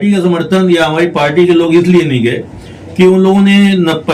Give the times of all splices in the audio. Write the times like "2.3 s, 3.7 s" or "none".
none